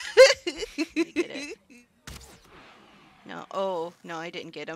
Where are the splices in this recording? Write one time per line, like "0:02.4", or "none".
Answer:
0:01.6

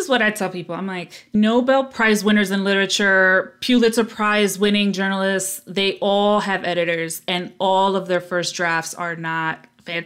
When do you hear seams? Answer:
0:01.3

